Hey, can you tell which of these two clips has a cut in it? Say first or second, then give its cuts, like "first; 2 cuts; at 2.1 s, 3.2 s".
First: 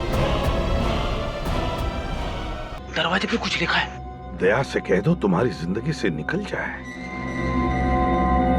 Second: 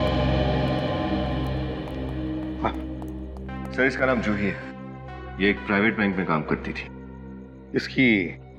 first; 1 cut; at 2.7 s